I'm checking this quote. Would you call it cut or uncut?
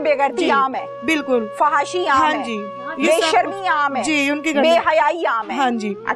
uncut